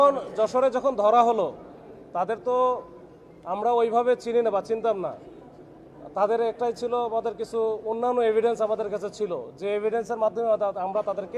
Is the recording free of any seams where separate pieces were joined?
yes; 0 cuts

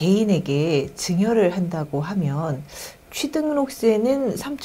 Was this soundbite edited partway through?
no; 0 cuts

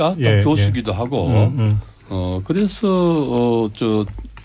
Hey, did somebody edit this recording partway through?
yes; 1 cut; at 3.4 s

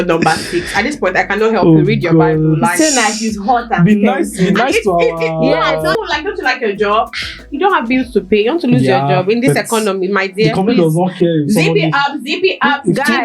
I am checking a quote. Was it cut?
yes; 1 cut; at 5.9 s

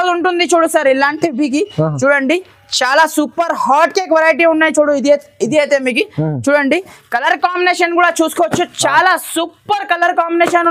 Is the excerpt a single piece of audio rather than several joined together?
yes; 0 cuts

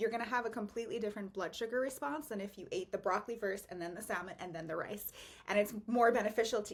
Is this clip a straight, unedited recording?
yes; 0 cuts

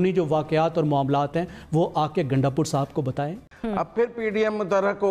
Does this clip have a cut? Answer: yes; 1 cut; at 3.5 s

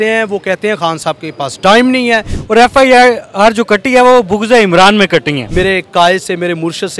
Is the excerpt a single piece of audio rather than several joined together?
no; 2 cuts; at 2.4 s, 5.4 s

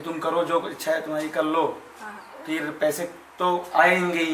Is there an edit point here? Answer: no; 0 cuts

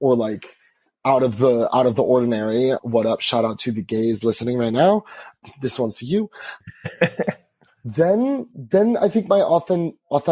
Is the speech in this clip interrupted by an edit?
yes; 1 cut; at 2.8 s

